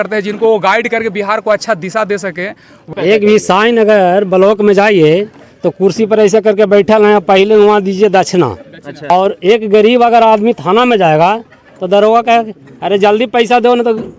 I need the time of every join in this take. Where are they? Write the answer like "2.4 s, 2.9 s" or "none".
2.8 s, 9.1 s